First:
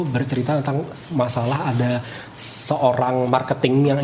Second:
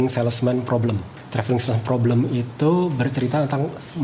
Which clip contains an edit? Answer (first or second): second